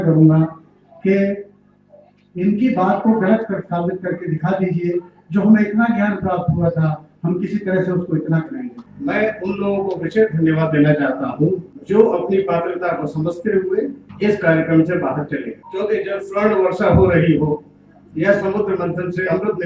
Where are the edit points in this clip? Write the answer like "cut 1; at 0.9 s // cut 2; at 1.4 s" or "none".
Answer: cut 1; at 8.8 s